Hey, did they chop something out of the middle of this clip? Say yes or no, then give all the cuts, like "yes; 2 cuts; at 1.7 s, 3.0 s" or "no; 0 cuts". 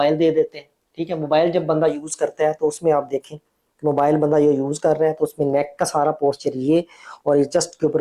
no; 0 cuts